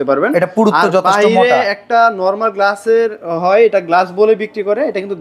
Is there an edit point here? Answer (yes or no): no